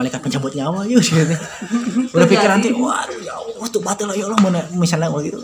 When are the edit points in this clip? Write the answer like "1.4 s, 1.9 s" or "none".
none